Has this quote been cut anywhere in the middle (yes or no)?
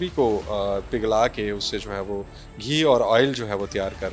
no